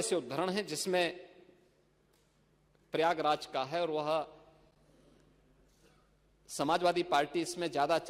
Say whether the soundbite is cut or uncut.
uncut